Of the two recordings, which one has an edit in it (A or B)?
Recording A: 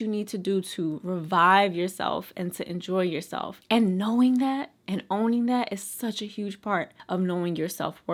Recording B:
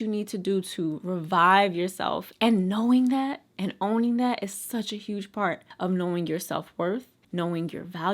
B